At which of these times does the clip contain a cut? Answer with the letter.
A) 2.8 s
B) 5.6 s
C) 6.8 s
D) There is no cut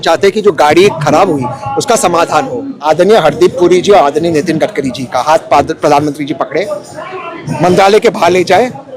A